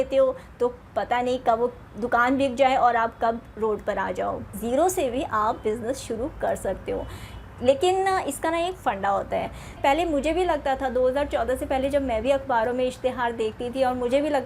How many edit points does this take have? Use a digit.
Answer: 2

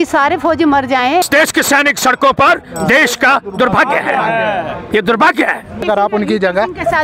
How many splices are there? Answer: 2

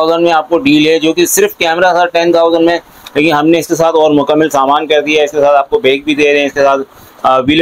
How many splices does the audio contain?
0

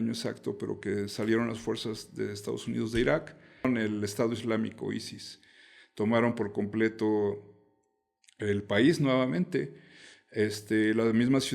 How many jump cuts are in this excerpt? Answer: 1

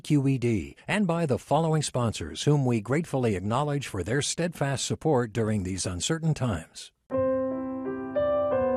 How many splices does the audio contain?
1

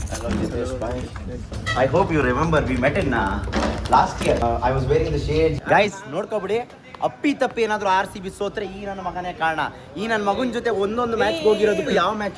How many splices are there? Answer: 3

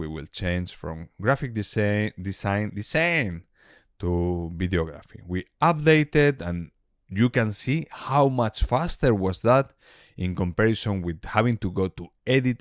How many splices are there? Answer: 0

